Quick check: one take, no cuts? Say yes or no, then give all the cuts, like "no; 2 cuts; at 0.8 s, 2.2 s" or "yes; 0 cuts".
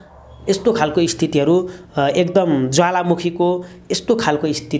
yes; 0 cuts